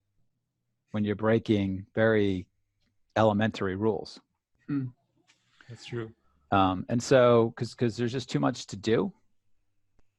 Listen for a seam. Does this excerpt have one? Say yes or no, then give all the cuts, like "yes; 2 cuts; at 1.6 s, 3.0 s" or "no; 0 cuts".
no; 0 cuts